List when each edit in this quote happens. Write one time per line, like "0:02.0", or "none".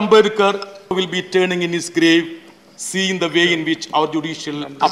0:00.9